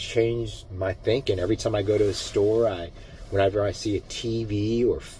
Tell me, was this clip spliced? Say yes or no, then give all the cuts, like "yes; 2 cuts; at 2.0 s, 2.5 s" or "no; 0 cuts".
no; 0 cuts